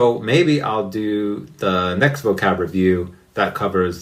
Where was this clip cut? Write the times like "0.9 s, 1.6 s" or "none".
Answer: none